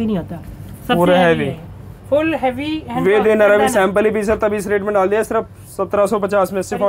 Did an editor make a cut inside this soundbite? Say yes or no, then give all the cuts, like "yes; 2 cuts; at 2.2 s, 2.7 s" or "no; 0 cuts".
no; 0 cuts